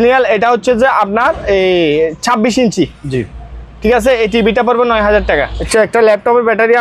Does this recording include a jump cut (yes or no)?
yes